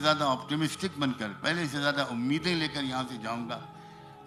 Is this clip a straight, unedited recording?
yes; 0 cuts

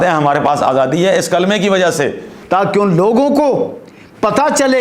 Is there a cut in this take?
yes; 1 cut; at 2.4 s

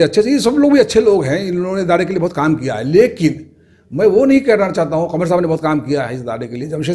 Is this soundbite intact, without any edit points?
yes; 0 cuts

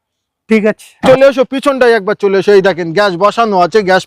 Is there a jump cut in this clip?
yes; 1 cut; at 1.0 s

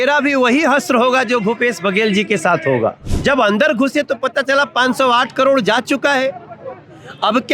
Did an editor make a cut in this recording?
yes; 1 cut; at 3.1 s

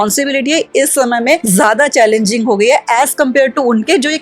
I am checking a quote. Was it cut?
yes; 1 cut; at 1.4 s

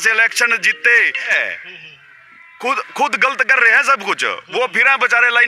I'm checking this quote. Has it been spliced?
yes; 1 cut; at 1.3 s

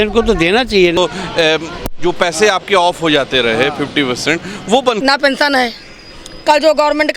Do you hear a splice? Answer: yes; 2 cuts; at 1.0 s, 5.0 s

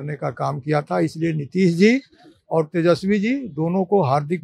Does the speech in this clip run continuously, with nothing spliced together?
yes; 0 cuts

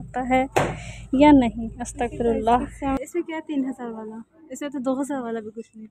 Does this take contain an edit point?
yes; 1 cut; at 3.0 s

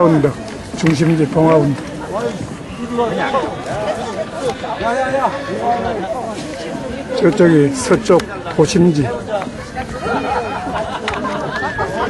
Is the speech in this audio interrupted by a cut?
no; 0 cuts

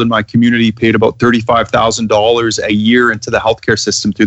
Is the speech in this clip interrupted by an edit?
no; 0 cuts

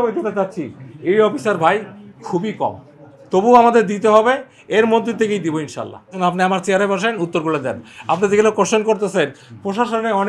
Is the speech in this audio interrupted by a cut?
yes; 1 cut; at 6.1 s

